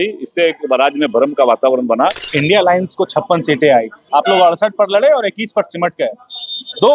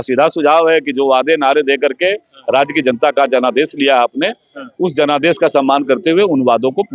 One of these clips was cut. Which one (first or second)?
first